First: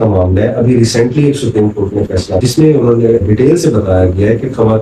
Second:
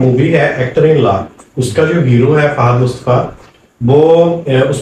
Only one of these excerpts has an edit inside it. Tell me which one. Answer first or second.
first